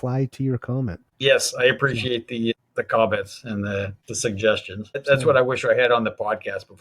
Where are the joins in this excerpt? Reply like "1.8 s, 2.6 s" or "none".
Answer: 1.0 s, 2.5 s, 4.0 s, 5.0 s